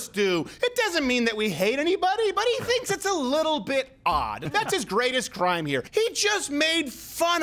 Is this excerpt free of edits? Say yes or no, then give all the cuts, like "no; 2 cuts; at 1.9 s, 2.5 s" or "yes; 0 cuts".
no; 2 cuts; at 4.4 s, 5.9 s